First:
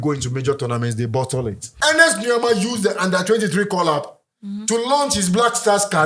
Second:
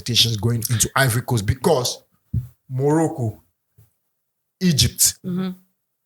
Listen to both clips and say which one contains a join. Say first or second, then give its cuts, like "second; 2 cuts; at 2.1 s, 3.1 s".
first; 1 cut; at 1.7 s